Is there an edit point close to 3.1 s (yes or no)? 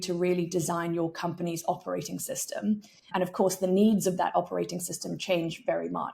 yes